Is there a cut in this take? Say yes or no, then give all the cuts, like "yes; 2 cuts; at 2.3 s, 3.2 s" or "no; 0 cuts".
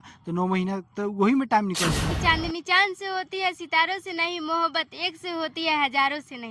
yes; 1 cut; at 2.1 s